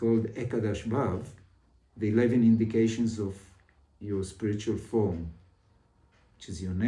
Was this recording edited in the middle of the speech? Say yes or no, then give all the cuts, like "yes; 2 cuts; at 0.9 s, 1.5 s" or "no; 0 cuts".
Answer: no; 0 cuts